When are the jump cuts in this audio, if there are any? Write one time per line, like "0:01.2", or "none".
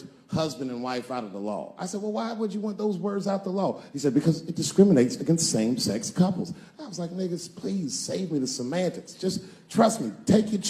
none